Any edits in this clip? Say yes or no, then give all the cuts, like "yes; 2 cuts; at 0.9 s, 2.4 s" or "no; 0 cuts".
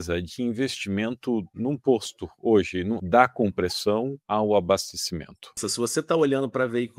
yes; 4 cuts; at 1.5 s, 3.0 s, 4.2 s, 5.6 s